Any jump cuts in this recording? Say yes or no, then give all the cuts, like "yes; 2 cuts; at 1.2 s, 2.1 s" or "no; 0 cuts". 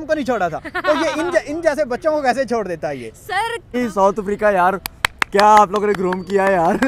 yes; 1 cut; at 3.8 s